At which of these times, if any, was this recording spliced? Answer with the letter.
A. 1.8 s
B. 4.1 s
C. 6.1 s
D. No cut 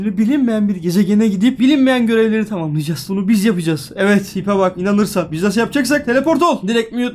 D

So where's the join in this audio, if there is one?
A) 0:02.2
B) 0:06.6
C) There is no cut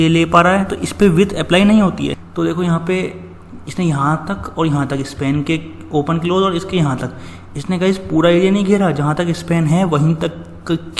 A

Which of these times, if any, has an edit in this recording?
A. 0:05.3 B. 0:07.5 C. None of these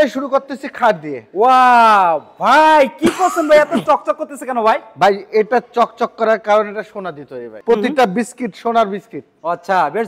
B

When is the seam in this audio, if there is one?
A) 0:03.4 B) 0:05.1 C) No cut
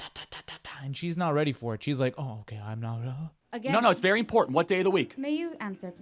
A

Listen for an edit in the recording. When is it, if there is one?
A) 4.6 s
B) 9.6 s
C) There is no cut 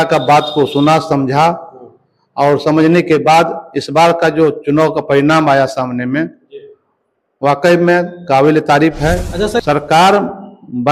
B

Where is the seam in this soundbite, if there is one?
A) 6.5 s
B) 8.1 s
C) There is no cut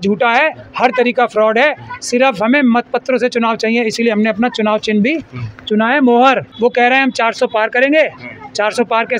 A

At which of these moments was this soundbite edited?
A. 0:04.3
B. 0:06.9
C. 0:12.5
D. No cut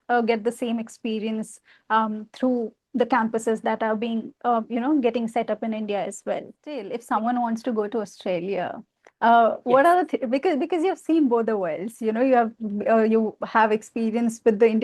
B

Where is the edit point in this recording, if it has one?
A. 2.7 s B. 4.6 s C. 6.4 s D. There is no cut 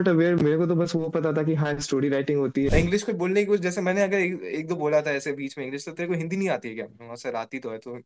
A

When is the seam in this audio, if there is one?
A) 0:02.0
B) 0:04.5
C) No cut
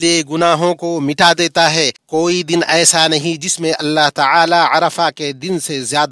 A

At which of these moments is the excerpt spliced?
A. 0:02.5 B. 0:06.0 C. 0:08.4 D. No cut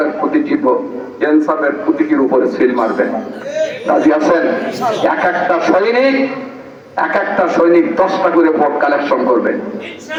D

